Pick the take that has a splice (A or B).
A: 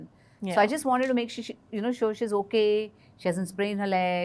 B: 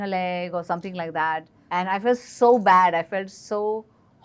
B